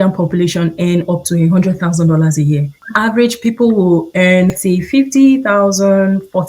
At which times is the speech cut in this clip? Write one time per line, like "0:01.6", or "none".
0:02.8
0:04.6